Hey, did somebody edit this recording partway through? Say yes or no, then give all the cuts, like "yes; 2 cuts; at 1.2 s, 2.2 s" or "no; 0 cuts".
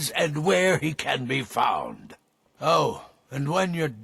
no; 0 cuts